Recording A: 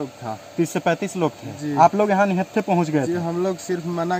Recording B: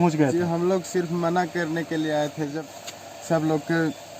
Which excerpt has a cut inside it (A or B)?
B